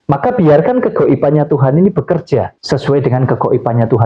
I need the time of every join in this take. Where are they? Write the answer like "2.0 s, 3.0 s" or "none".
2.6 s